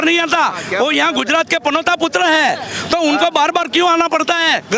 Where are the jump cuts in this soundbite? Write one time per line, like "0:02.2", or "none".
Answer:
none